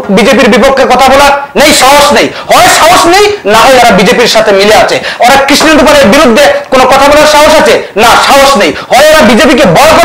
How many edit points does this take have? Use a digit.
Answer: 0